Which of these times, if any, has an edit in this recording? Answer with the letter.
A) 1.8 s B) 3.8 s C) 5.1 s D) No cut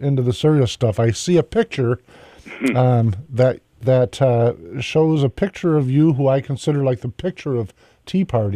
C